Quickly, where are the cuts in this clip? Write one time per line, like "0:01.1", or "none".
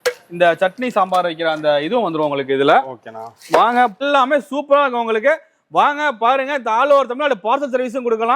0:03.9

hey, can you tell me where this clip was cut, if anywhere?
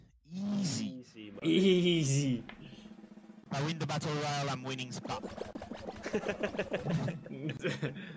none

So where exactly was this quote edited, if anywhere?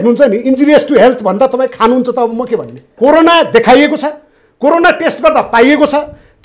0:02.9

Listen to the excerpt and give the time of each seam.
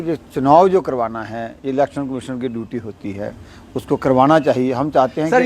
none

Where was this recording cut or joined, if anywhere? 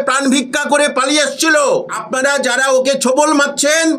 0:01.9

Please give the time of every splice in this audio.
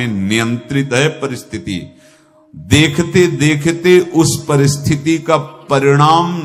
none

